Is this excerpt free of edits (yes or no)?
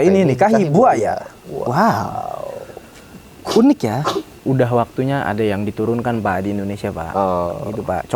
no